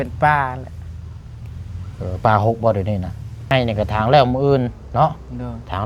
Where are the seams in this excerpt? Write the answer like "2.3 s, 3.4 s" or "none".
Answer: 3.5 s